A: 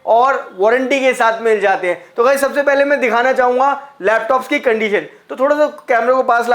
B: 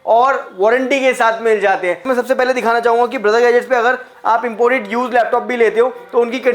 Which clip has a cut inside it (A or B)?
B